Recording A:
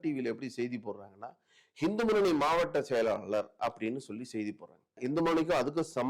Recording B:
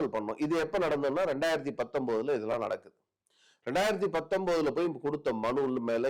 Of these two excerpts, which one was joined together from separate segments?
A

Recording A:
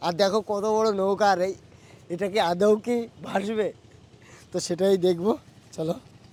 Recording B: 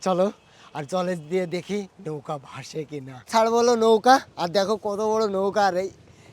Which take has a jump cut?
B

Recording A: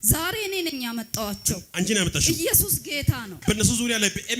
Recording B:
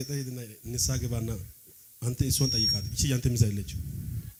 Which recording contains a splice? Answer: A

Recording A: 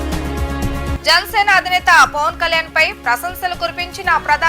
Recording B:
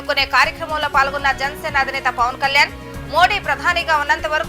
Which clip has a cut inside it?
A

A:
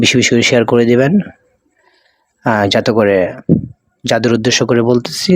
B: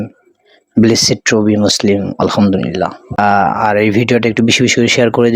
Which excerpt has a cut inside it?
B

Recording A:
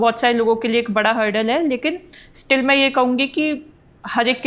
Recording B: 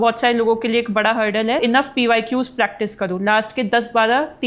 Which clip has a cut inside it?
B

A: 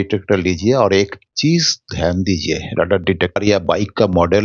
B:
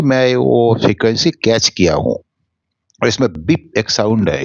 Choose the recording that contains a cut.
A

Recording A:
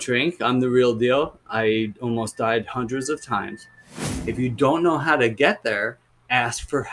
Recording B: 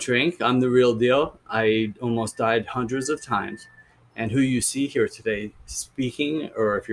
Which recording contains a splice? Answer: A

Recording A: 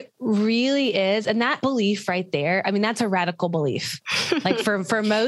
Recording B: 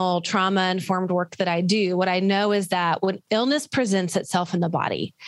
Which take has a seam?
A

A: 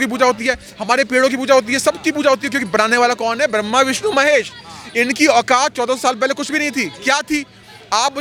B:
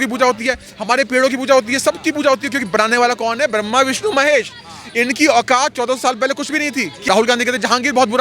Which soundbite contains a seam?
B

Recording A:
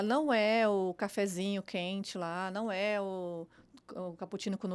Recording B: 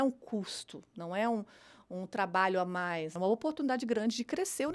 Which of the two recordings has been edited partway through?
B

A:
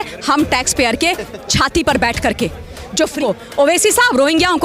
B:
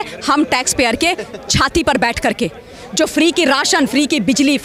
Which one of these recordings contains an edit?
A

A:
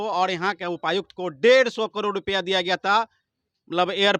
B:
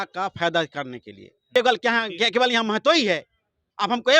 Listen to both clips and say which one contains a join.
B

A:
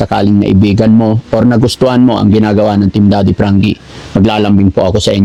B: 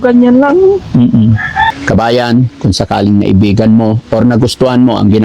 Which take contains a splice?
B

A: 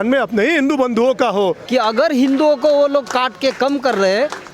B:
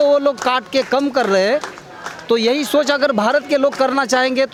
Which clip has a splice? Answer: A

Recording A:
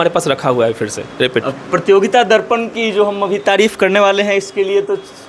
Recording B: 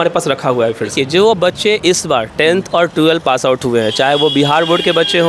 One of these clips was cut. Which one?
B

